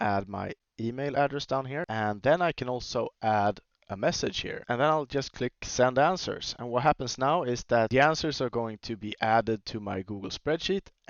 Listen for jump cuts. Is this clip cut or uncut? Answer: cut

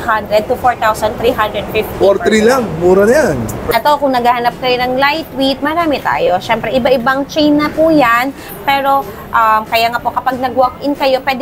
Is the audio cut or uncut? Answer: cut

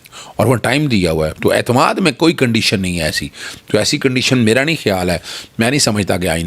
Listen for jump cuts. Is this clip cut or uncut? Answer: uncut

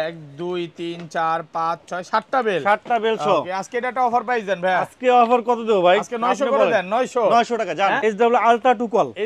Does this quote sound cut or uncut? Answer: cut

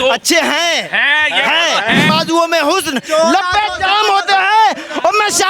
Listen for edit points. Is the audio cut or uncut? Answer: cut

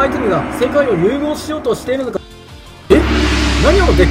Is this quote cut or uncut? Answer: cut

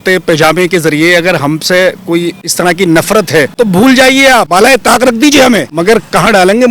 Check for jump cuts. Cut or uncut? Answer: cut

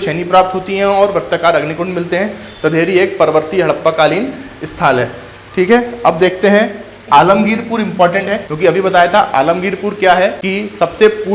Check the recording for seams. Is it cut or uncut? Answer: cut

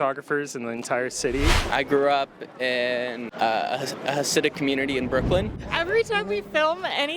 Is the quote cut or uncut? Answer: cut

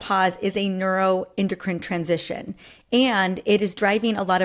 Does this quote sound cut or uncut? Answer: uncut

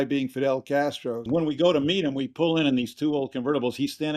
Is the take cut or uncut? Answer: cut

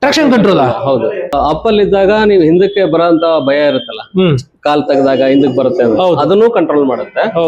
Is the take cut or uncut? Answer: cut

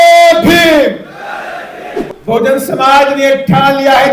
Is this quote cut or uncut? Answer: cut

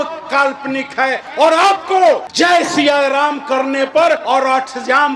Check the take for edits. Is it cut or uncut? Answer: cut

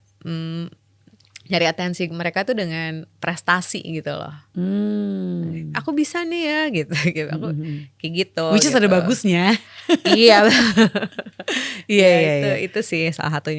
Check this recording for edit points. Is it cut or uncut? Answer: uncut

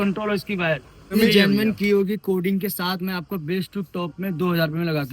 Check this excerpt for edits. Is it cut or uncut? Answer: cut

